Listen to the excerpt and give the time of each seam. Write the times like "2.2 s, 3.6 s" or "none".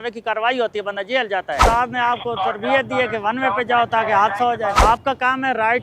1.6 s, 4.8 s